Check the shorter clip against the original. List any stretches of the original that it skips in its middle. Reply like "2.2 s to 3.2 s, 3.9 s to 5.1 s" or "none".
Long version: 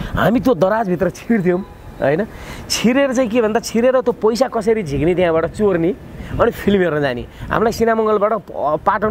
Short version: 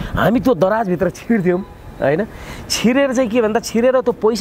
none